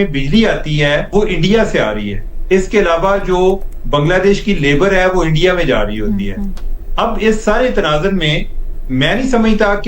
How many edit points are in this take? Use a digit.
1